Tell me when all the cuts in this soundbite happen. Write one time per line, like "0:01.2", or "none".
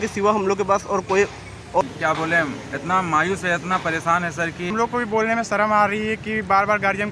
0:01.8
0:04.7